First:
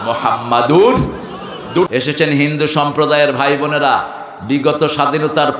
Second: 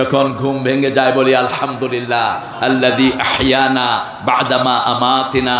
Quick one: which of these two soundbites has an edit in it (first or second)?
first